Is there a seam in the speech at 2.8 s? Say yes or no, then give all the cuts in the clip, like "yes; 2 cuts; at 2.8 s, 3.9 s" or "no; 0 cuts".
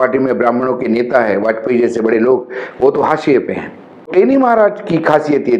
no; 1 cut; at 4.1 s